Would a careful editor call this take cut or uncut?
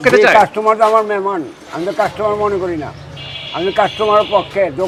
uncut